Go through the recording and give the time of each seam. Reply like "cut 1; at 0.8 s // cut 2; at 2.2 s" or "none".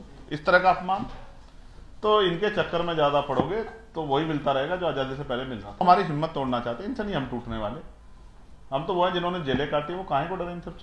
cut 1; at 5.8 s